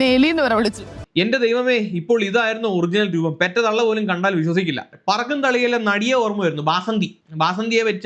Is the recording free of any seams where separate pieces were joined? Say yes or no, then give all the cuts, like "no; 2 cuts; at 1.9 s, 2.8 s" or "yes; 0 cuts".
no; 1 cut; at 1.0 s